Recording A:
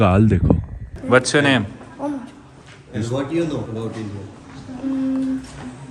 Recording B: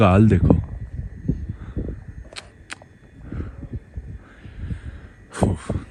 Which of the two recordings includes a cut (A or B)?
A